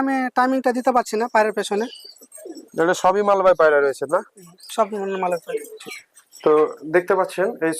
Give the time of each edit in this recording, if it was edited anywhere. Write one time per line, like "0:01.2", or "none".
0:06.3